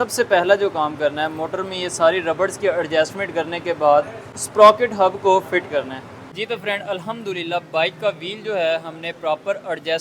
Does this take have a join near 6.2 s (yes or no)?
yes